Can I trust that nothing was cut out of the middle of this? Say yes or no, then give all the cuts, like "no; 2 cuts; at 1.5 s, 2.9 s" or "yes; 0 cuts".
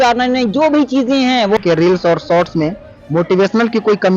no; 1 cut; at 1.6 s